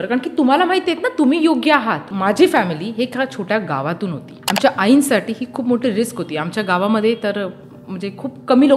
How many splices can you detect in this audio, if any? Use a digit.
2